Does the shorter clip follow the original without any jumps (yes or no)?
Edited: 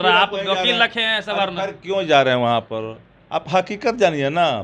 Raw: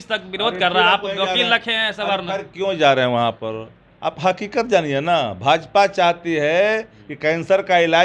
yes